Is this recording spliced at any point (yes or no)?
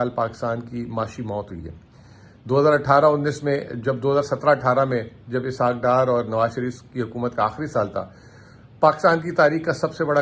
no